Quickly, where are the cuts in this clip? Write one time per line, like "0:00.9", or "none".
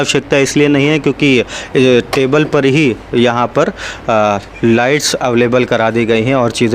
none